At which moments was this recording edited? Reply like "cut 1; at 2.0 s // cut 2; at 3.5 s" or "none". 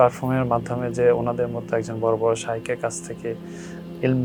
none